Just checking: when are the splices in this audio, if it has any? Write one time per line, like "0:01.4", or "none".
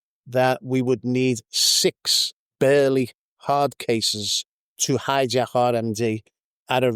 none